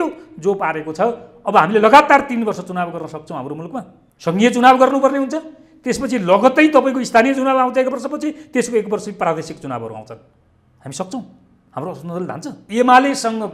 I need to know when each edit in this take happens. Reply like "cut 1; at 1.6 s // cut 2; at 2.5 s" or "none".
cut 1; at 4.0 s // cut 2; at 12.5 s